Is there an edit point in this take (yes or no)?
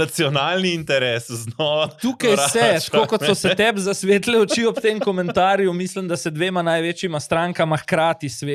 no